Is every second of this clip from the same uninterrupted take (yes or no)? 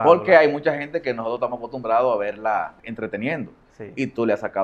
no